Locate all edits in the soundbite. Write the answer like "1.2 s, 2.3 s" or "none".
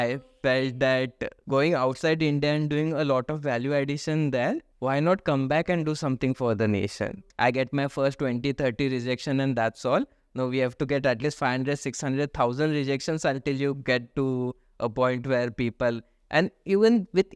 1.3 s, 4.7 s, 7.1 s